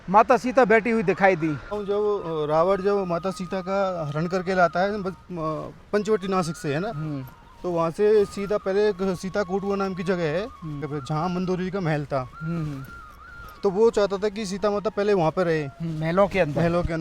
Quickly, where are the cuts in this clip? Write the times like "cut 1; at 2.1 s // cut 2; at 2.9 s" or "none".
cut 1; at 1.7 s // cut 2; at 10.9 s